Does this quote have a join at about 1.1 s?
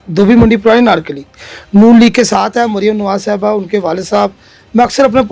no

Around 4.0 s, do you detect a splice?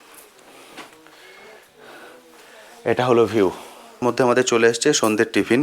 yes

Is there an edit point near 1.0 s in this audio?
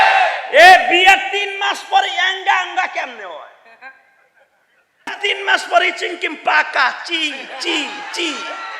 no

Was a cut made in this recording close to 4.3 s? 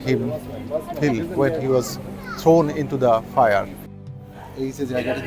yes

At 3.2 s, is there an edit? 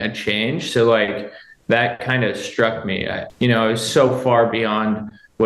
yes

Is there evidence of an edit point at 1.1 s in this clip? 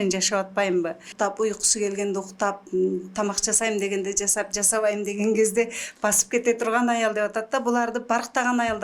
yes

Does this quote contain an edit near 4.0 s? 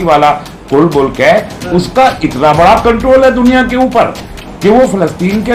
no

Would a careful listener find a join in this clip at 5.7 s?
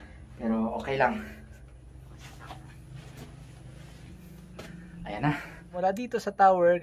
yes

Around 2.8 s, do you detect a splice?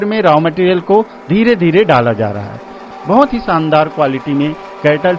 yes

